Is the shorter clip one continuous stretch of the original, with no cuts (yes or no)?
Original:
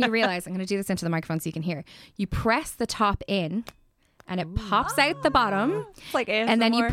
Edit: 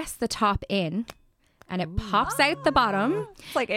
yes